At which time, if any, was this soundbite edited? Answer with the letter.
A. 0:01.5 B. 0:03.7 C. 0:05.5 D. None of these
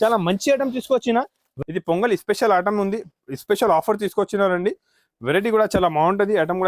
A